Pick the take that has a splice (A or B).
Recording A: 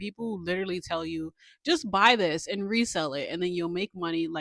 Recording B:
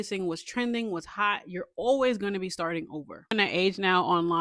B